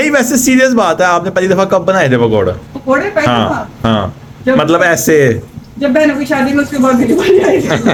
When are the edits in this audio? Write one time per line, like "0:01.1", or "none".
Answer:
none